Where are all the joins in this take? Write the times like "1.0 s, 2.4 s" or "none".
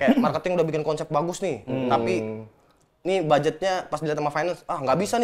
none